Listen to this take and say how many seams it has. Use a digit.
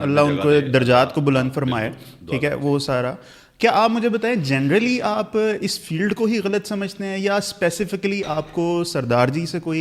0